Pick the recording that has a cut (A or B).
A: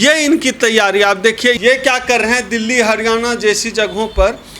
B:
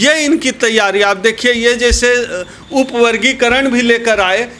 A